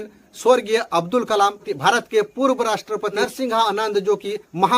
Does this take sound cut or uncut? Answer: cut